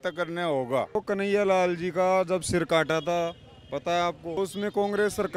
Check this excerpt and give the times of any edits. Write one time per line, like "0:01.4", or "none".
0:00.9
0:04.4